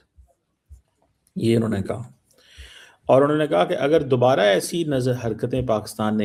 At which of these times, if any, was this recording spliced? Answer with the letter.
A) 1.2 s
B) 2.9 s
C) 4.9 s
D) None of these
D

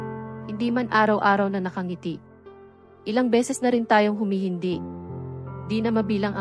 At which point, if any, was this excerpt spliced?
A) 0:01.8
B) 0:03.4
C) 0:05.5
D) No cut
C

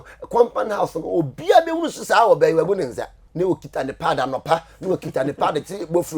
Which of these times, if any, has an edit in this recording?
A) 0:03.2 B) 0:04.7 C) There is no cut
A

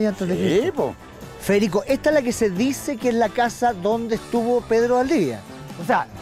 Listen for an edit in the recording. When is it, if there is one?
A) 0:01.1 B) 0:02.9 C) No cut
A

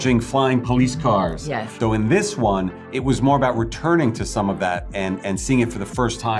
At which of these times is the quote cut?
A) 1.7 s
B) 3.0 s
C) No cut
A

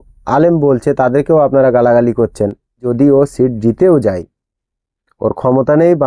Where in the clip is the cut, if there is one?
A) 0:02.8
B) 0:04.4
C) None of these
A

